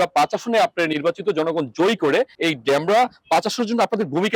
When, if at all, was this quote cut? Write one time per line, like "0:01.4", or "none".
0:02.3